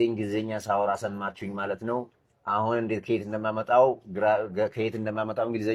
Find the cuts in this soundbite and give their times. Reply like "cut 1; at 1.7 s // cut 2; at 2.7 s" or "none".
none

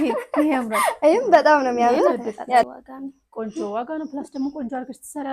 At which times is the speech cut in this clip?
cut 1; at 2.6 s

